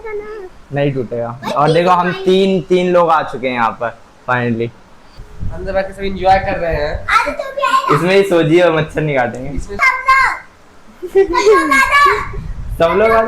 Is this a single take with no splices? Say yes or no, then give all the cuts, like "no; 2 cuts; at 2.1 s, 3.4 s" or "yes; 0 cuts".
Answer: no; 2 cuts; at 5.1 s, 9.8 s